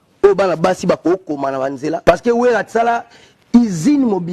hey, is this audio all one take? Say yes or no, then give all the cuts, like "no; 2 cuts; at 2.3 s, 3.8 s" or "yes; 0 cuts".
no; 1 cut; at 1.8 s